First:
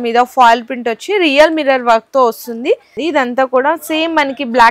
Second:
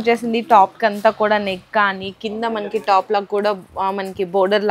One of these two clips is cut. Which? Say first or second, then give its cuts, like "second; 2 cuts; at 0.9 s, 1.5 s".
first; 1 cut; at 2.9 s